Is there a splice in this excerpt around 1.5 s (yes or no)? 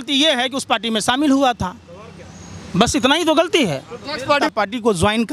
no